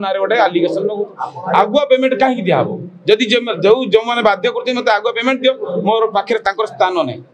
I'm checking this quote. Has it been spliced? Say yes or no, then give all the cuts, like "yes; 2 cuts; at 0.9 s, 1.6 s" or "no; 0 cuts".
yes; 1 cut; at 1.2 s